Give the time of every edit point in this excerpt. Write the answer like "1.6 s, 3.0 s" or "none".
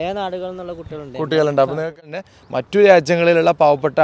2.0 s